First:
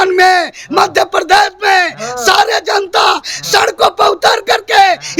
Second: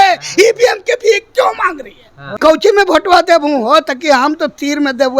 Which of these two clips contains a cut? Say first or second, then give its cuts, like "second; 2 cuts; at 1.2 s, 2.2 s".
second; 1 cut; at 2.2 s